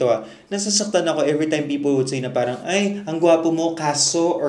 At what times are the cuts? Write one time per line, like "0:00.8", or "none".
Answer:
none

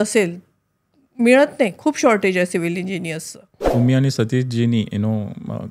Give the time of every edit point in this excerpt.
0:03.7

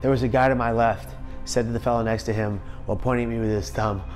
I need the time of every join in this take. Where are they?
none

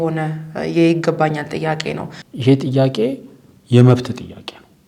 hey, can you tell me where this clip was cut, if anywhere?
0:02.2

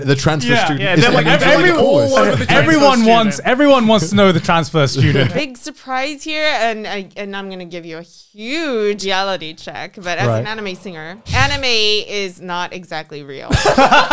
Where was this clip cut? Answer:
0:05.3
0:09.0
0:11.3

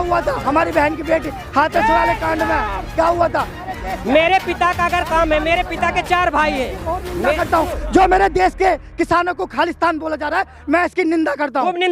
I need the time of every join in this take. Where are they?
0:03.6

